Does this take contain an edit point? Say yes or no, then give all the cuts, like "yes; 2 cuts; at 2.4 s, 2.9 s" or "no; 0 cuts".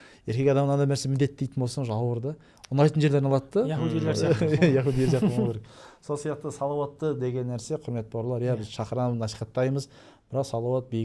no; 0 cuts